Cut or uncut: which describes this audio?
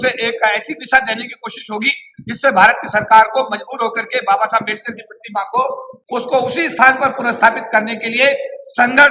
cut